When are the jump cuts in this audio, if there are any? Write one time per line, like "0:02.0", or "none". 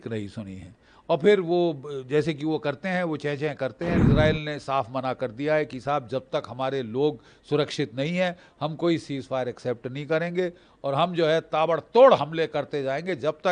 0:04.0